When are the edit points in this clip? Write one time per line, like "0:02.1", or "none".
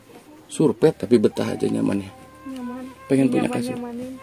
0:01.0